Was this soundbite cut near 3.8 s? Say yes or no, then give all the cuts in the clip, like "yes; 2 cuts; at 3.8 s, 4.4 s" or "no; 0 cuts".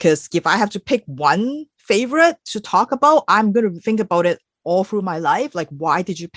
yes; 1 cut; at 3.8 s